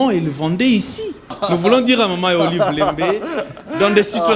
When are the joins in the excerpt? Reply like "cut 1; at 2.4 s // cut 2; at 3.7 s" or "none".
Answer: cut 1; at 1.3 s